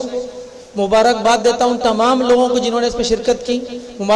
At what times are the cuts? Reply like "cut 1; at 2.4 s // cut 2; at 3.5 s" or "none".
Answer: none